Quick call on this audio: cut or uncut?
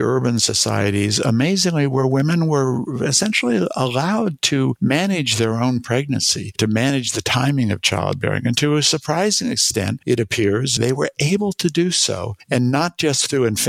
cut